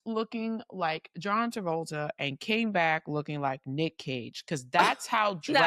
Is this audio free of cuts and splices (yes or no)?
yes